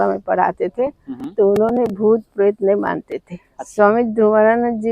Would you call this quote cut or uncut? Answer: cut